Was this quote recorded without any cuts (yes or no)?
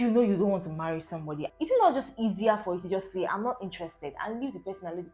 no